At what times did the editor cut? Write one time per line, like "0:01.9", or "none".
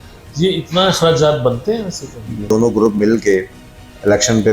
0:02.5